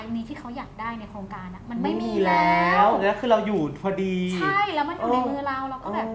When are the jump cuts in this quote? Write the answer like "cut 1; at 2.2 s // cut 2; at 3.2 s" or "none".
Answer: none